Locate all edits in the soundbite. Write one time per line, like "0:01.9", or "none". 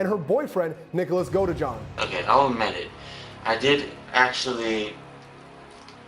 0:02.0